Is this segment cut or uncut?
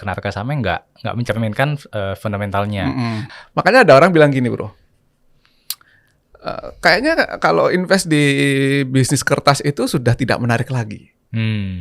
cut